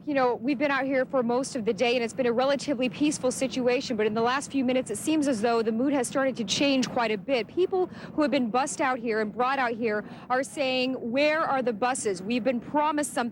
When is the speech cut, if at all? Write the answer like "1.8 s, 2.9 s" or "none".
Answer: none